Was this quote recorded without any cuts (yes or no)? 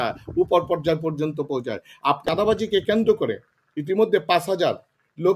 no